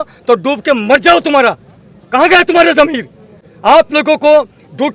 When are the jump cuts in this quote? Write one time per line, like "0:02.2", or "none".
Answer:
none